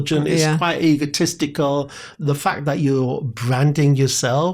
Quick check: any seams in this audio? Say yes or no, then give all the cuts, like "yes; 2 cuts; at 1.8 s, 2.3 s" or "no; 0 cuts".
yes; 1 cut; at 2.0 s